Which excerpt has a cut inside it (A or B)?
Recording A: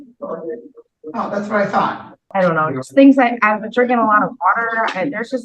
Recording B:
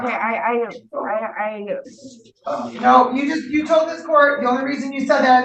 A